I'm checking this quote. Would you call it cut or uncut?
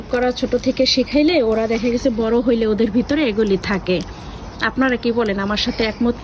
uncut